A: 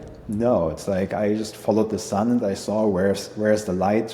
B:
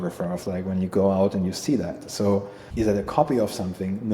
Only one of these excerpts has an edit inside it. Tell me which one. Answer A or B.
B